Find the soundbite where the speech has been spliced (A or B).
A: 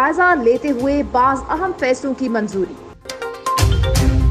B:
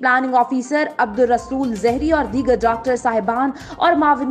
A